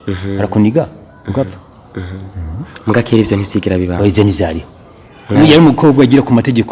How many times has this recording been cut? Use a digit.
0